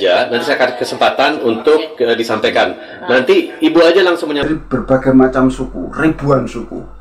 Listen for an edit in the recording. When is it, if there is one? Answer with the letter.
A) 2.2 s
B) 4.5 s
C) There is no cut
B